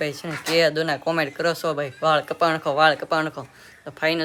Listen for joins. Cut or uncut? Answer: uncut